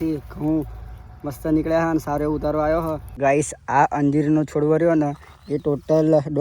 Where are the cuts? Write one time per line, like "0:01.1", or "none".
0:03.2